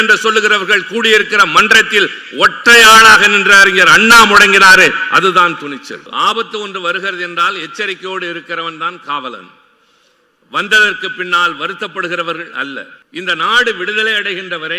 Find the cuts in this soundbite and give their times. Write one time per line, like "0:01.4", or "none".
0:06.0
0:13.0